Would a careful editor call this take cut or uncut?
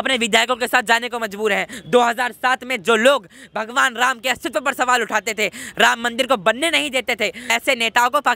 cut